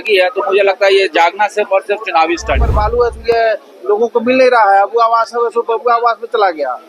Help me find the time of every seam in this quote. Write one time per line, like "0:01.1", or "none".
0:02.7